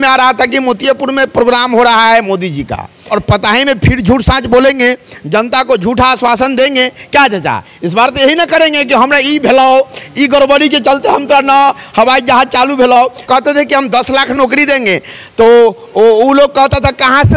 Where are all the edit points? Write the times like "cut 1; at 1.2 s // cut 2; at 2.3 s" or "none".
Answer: cut 1; at 3.0 s // cut 2; at 13.2 s